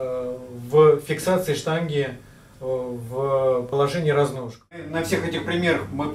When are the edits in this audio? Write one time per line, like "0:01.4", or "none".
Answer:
0:04.9